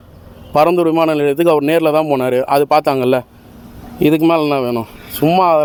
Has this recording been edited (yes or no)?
no